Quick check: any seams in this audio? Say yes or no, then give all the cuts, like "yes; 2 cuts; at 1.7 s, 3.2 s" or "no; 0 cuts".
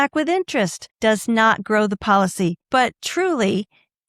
no; 0 cuts